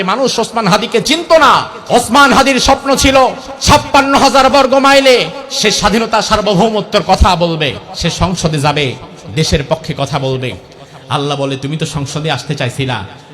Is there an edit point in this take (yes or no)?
yes